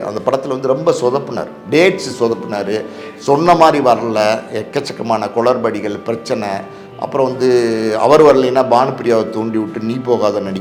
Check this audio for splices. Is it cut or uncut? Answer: uncut